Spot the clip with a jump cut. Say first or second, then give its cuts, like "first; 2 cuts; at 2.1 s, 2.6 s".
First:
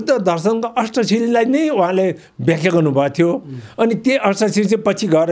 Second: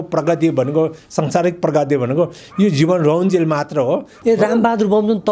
second; 1 cut; at 4.1 s